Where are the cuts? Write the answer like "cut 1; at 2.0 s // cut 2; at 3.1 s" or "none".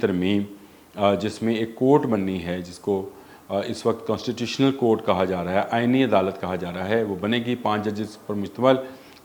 none